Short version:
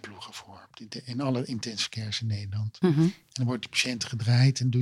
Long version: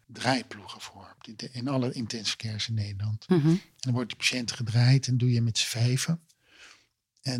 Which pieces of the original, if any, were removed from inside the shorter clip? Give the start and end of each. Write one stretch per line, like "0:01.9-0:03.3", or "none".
none